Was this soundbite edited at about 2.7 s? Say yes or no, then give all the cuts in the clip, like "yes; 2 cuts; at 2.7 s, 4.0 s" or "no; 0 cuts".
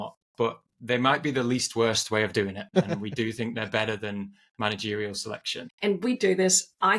yes; 2 cuts; at 2.7 s, 5.6 s